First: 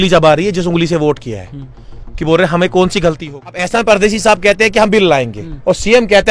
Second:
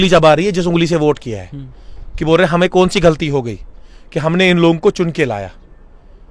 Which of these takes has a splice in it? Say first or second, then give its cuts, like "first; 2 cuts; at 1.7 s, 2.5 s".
first; 1 cut; at 3.6 s